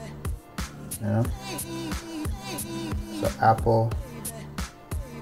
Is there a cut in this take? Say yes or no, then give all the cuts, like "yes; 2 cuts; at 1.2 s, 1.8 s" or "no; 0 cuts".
yes; 3 cuts; at 1.7 s, 3.2 s, 3.9 s